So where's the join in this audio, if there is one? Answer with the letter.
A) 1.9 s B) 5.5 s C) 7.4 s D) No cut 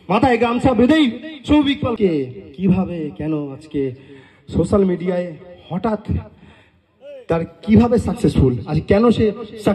A